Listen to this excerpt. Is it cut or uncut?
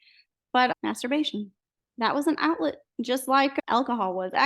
cut